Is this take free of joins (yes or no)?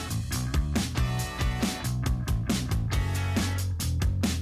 no